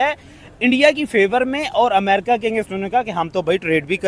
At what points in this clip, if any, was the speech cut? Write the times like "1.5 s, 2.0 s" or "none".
none